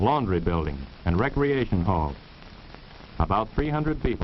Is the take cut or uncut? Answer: cut